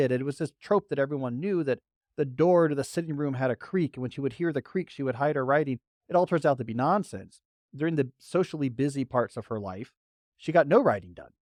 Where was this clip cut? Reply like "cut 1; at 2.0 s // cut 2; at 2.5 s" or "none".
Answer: none